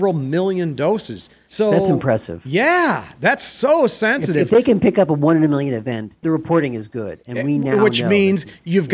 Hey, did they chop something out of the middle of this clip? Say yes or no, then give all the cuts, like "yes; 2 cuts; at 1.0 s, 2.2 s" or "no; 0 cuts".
no; 0 cuts